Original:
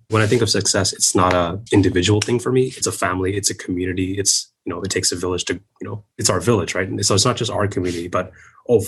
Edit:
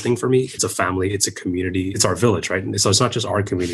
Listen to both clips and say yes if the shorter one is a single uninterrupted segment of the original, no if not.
no